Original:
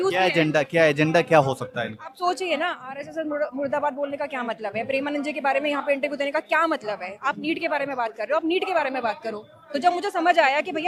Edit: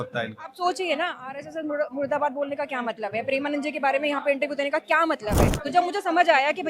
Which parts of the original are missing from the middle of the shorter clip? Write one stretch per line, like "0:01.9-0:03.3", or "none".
0:07.0-0:09.5